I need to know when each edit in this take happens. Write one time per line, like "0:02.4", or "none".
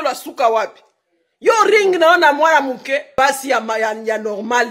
0:03.1